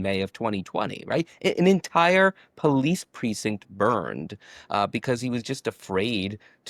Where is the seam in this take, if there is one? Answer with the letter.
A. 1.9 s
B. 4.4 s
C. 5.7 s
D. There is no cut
D